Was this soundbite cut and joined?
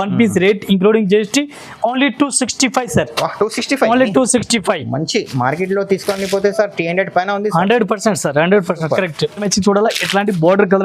yes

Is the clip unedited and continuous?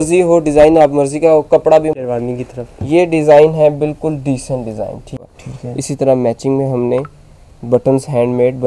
no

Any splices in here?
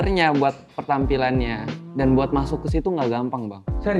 no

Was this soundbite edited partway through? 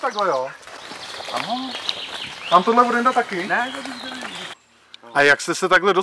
yes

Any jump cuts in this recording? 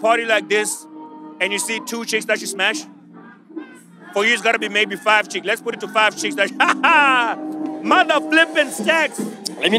no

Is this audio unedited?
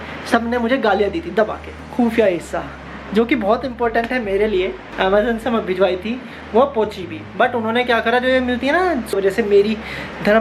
no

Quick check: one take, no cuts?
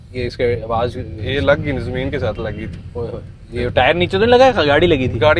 yes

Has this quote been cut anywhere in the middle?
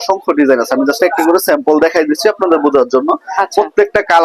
no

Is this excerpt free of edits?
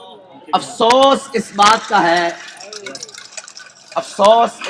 no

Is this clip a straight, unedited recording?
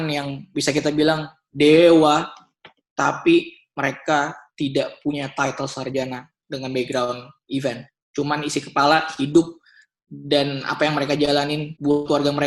yes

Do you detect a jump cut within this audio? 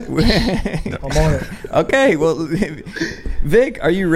no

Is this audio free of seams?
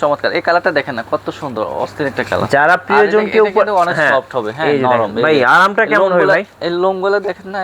yes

